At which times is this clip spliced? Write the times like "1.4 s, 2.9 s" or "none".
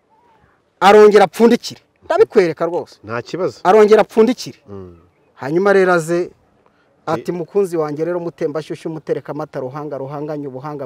none